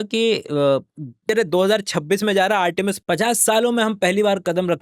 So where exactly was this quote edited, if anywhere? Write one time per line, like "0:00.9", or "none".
0:01.3
0:03.0